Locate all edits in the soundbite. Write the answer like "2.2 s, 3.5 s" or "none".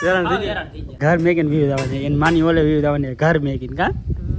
1.0 s